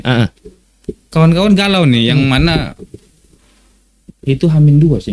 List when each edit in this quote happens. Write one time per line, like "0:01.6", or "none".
none